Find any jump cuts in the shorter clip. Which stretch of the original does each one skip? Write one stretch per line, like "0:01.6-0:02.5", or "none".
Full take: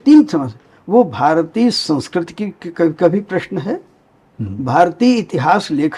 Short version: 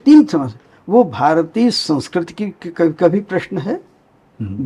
none